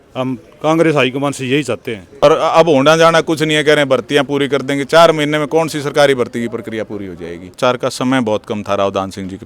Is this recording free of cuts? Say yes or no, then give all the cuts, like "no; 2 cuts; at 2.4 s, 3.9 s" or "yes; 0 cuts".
no; 2 cuts; at 2.2 s, 7.5 s